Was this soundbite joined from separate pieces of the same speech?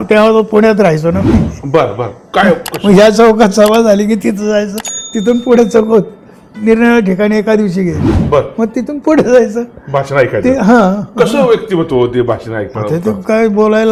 no; 0 cuts

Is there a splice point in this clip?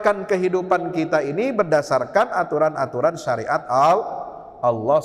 no; 0 cuts

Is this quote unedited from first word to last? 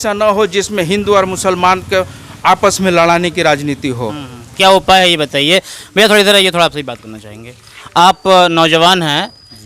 yes; 0 cuts

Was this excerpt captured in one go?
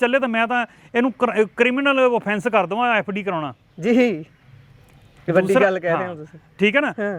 yes; 0 cuts

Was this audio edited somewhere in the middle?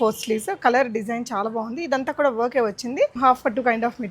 yes; 1 cut; at 3.2 s

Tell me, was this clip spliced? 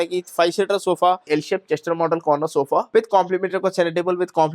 yes; 2 cuts; at 1.2 s, 2.9 s

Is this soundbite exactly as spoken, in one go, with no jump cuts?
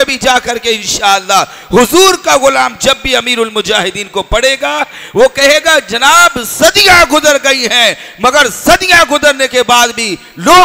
yes; 0 cuts

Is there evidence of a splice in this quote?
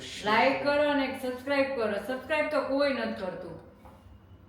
no; 0 cuts

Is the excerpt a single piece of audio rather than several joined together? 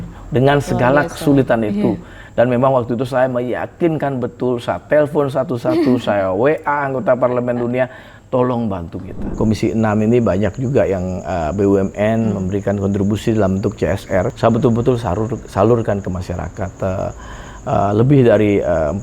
no; 2 cuts; at 9.2 s, 14.3 s

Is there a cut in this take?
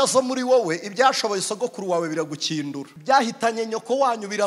yes; 1 cut; at 2.9 s

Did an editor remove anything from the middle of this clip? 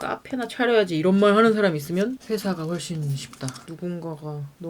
yes; 1 cut; at 3.6 s

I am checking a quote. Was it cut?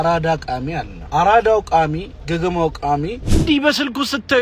yes; 3 cuts; at 0.9 s, 2.1 s, 3.2 s

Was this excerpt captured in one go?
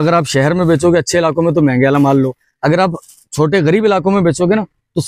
yes; 0 cuts

